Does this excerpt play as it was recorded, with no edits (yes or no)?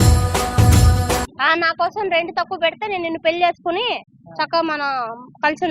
no